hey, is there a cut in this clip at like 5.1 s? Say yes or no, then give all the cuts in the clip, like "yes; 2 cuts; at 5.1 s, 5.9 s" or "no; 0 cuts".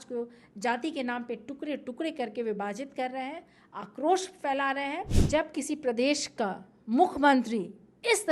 yes; 1 cut; at 5.1 s